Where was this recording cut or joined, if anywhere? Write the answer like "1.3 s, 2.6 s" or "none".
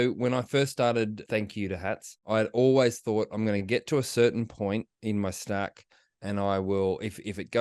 1.2 s, 2.2 s